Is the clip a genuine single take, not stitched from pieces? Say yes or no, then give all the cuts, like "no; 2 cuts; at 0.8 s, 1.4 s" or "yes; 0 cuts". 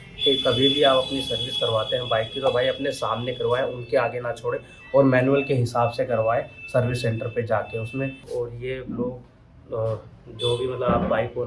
no; 1 cut; at 8.3 s